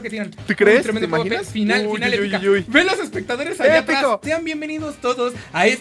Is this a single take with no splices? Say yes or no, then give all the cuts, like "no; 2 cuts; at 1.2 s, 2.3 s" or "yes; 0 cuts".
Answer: no; 1 cut; at 4.2 s